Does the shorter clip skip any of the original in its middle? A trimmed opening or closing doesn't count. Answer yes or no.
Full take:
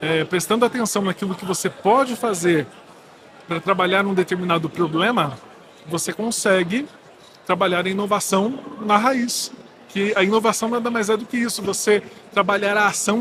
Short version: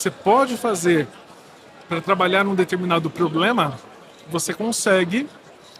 no